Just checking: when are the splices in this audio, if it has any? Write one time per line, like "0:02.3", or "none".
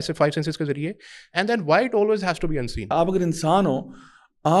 0:02.9